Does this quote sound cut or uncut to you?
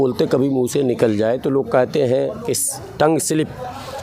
uncut